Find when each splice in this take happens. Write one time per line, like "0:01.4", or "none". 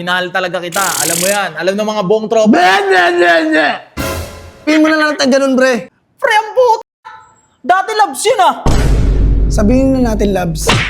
0:04.7
0:06.0